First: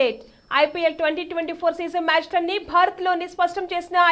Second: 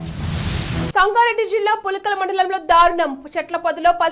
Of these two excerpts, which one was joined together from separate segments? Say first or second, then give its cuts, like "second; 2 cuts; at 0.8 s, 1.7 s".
second; 1 cut; at 0.9 s